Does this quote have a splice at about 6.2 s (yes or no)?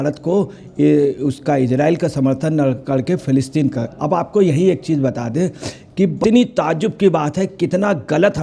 yes